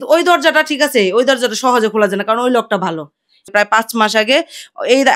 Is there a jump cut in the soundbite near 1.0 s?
no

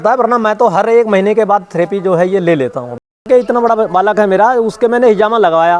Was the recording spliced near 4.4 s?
no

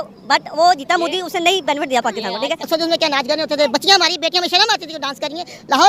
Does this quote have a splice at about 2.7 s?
yes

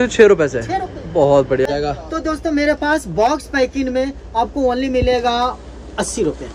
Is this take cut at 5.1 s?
no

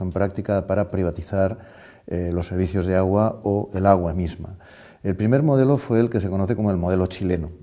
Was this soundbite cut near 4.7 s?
no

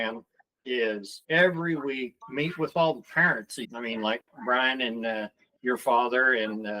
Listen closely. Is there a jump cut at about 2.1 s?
yes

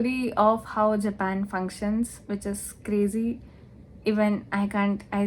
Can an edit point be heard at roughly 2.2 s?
no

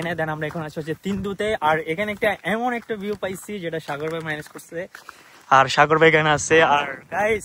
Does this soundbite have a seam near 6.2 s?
no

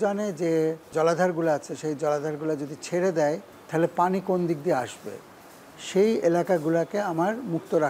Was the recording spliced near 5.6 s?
no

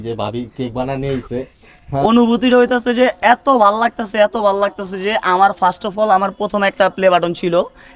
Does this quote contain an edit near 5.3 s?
no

